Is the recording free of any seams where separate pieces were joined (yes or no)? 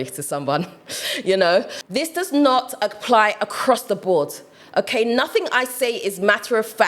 no